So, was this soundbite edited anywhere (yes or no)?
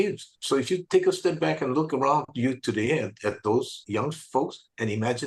no